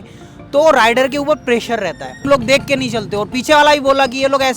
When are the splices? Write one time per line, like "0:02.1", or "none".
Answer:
0:02.2